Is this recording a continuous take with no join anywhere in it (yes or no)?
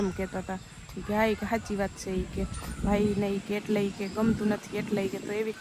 yes